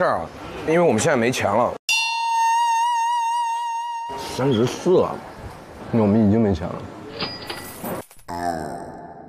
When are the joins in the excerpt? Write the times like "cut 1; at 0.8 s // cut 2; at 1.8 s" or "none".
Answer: none